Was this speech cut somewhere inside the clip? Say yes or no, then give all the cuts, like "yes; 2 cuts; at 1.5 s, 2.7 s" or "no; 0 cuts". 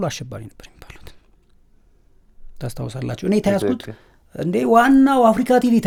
no; 0 cuts